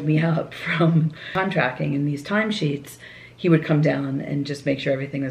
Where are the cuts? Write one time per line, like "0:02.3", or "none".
0:01.3